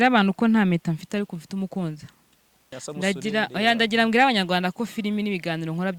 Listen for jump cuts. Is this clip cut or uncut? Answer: cut